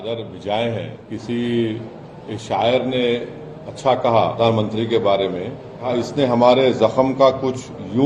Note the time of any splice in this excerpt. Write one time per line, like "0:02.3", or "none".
0:01.0
0:04.4
0:05.9